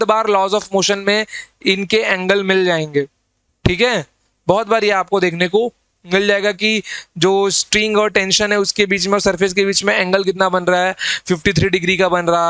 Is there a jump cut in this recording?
no; 0 cuts

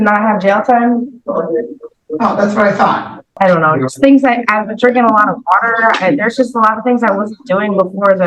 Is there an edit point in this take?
yes; 1 cut; at 3.3 s

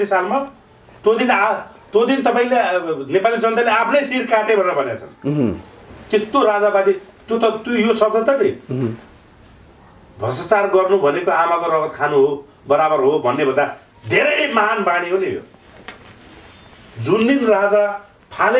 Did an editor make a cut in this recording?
no; 0 cuts

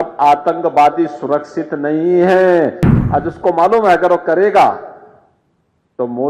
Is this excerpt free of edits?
no; 1 cut; at 2.8 s

